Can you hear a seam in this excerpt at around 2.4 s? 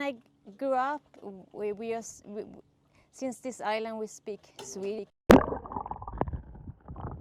no; 0 cuts

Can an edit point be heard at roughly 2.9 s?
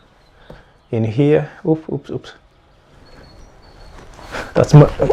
yes; 1 cut; at 2.9 s

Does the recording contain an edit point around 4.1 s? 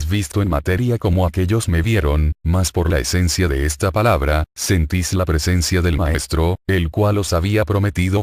yes; 1 cut; at 4.1 s

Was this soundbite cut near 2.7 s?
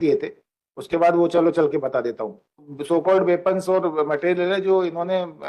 yes; 1 cut; at 2.7 s

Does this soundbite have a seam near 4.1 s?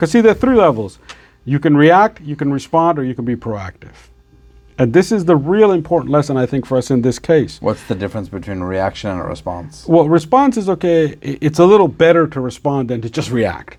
no; 0 cuts

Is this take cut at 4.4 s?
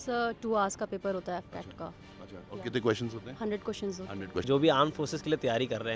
yes; 1 cut; at 4.4 s

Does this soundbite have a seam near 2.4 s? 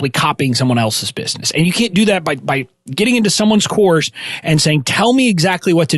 no; 0 cuts

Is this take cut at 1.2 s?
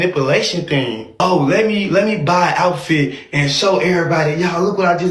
yes; 1 cut; at 1.2 s

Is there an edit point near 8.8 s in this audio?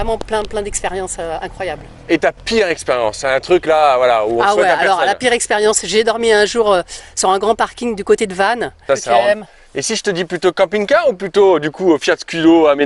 yes; 1 cut; at 8.8 s

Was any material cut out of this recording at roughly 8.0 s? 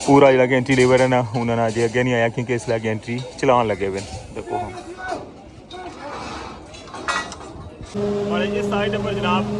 yes; 1 cut; at 8.0 s

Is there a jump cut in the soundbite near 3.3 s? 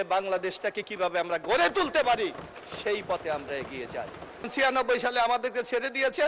no; 1 cut; at 4.5 s

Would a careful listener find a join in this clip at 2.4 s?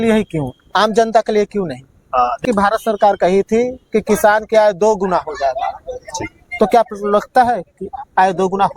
yes; 1 cut; at 2.4 s

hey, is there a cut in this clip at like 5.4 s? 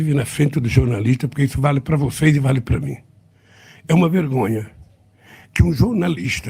yes; 2 cuts; at 1.9 s, 5.4 s

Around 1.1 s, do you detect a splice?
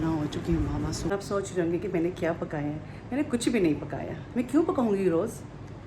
yes; 1 cut; at 1.1 s

